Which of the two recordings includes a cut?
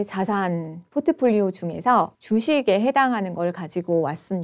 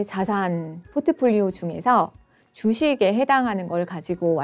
first; 1 cut; at 2.2 s

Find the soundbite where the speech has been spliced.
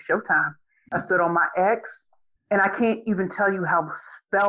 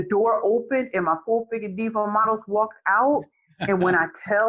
first; 1 cut; at 0.9 s

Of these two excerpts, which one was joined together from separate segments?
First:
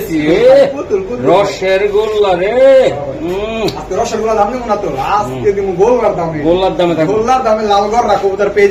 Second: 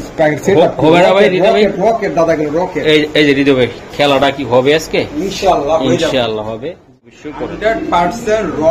second; 1 cut; at 7.1 s

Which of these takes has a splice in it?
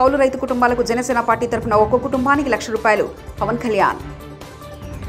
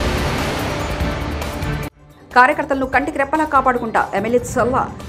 second; 1 cut; at 1.9 s

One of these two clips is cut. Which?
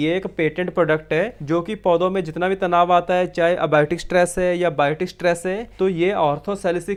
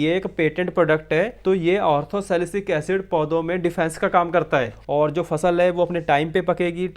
second; 2 cuts; at 1.3 s, 4.8 s

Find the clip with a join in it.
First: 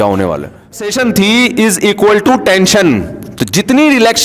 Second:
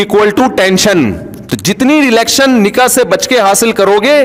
first; 1 cut; at 0.9 s

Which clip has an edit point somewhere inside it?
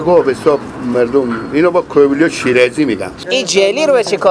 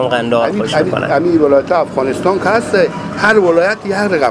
first; 1 cut; at 3.2 s

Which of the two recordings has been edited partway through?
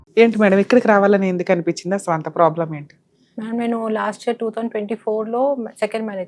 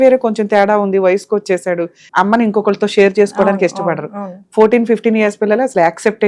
second; 1 cut; at 2.0 s

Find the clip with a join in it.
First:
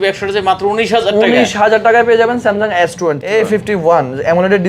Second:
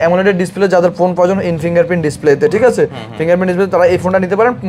first; 1 cut; at 3.2 s

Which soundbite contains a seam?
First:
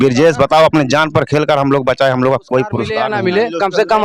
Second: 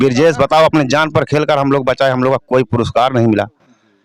first; 1 cut; at 3.0 s

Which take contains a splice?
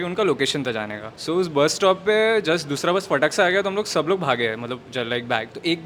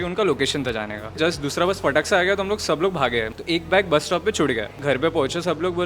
second; 3 cuts; at 1.2 s, 3.4 s, 4.8 s

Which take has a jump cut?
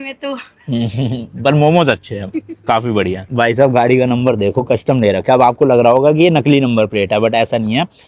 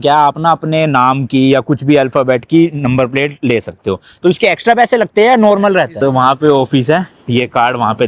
second; 1 cut; at 5.9 s

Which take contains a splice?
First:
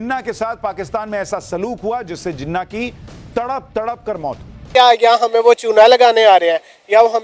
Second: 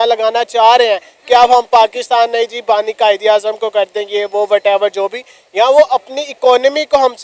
first; 1 cut; at 4.7 s

